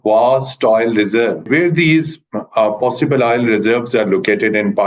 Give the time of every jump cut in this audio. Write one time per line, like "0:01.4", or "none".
0:01.4